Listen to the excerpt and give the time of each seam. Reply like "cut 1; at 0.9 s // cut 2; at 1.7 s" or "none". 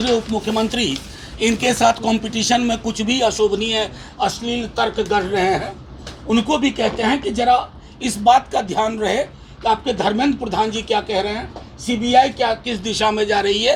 none